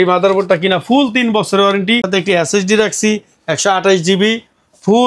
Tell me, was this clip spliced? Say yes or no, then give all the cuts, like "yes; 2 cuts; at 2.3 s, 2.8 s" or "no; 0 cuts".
yes; 1 cut; at 2.1 s